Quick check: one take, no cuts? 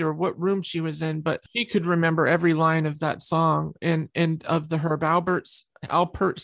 no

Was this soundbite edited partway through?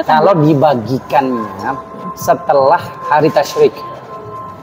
no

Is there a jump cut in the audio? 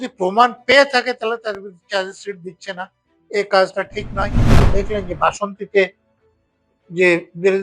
yes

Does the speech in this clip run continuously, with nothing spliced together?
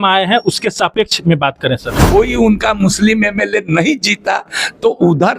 no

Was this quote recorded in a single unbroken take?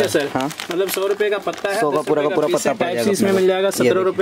yes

